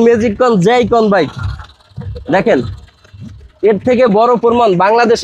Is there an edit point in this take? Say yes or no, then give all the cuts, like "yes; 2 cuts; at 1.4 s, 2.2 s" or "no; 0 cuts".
no; 0 cuts